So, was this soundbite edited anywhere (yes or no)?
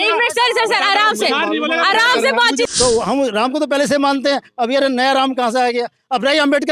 yes